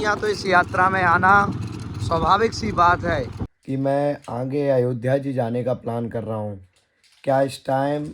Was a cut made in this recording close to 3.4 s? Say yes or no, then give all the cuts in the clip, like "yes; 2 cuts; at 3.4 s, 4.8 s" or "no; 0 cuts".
yes; 1 cut; at 3.4 s